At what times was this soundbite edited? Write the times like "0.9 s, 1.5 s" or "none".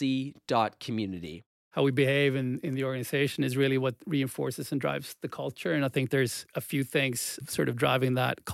1.5 s, 7.4 s